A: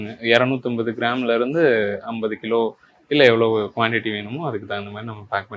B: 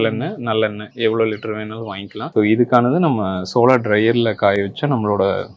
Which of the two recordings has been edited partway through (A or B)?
B